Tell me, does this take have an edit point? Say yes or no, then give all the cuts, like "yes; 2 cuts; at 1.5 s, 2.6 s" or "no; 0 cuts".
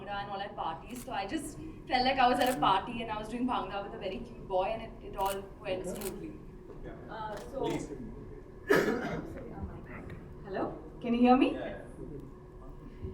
no; 0 cuts